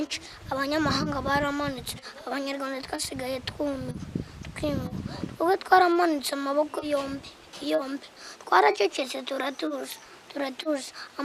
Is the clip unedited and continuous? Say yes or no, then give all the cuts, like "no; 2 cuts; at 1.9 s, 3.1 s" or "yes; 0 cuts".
yes; 0 cuts